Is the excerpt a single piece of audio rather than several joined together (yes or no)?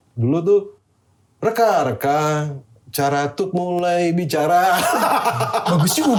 yes